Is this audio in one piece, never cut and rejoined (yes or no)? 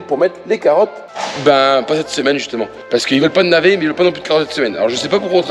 yes